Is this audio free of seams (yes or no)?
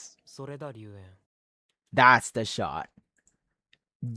yes